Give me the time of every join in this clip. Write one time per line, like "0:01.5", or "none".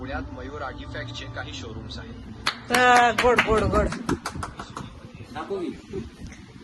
none